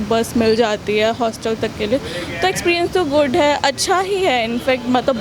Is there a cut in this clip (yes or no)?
no